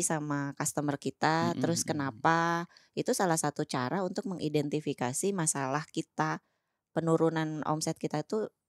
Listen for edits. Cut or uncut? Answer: uncut